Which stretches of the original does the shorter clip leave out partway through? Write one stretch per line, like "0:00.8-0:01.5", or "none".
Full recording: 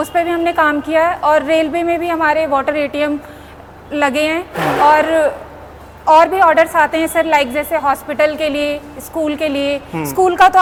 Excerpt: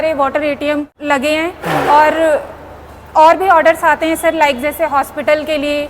0:03.3-0:03.9